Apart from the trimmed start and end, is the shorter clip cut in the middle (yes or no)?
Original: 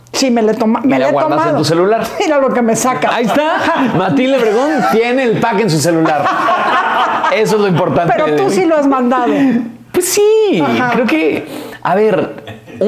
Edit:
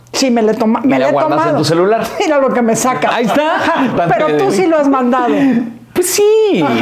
yes